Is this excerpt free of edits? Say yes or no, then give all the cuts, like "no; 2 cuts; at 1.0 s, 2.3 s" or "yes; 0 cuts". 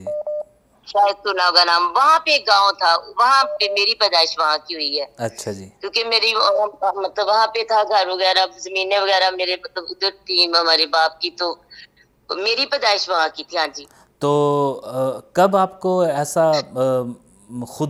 yes; 0 cuts